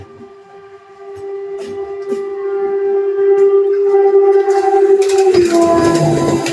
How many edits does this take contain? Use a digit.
0